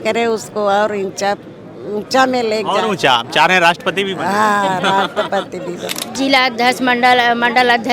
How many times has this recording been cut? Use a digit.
1